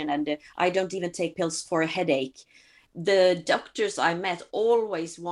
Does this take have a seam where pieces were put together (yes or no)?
yes